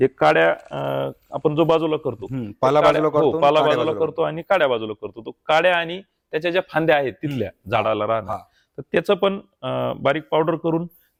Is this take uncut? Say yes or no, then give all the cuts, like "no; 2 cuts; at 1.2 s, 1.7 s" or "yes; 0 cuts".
yes; 0 cuts